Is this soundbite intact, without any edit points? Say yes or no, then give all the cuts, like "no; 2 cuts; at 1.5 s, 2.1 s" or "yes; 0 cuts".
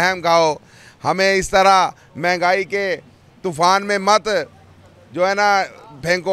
yes; 0 cuts